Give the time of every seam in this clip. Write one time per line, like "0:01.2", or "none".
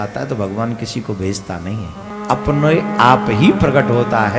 0:02.1